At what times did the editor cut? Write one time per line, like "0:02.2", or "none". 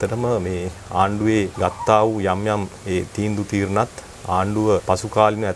0:01.5
0:04.8